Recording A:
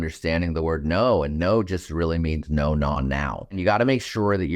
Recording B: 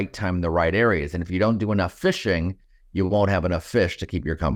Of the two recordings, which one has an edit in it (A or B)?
A